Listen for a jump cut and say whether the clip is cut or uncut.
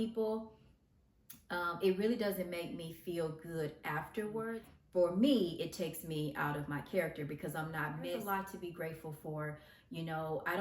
cut